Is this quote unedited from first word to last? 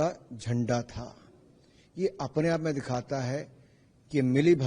yes; 0 cuts

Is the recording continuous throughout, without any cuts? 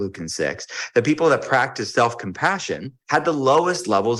no; 1 cut; at 2.9 s

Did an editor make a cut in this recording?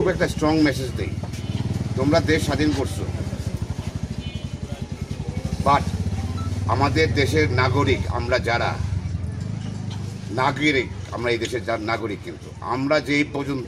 no; 0 cuts

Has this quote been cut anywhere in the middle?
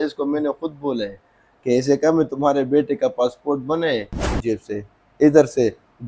yes; 1 cut; at 4.3 s

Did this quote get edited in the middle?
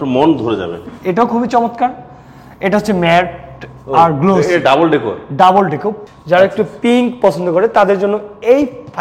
yes; 2 cuts; at 0.8 s, 6.0 s

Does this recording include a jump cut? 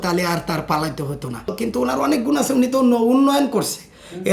yes; 1 cut; at 1.5 s

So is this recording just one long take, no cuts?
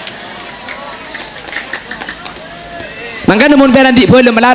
yes; 0 cuts

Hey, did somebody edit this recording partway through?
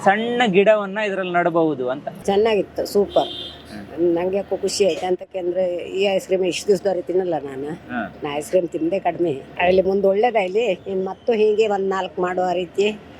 yes; 1 cut; at 2.1 s

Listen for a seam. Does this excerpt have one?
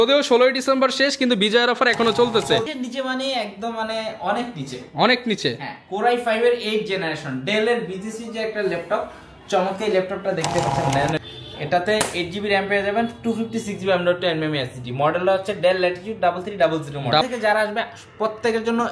yes; 3 cuts; at 2.7 s, 11.2 s, 17.2 s

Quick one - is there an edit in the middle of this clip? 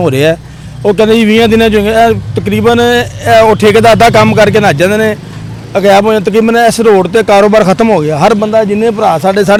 no; 0 cuts

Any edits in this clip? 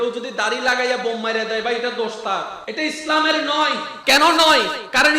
yes; 2 cuts; at 2.6 s, 3.9 s

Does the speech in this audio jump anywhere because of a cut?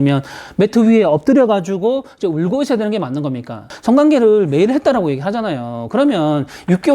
yes; 1 cut; at 3.6 s

